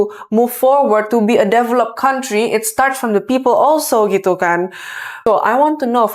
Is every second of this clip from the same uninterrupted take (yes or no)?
no